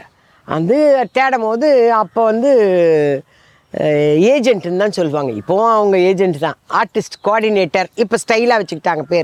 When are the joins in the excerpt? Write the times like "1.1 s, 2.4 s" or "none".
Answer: none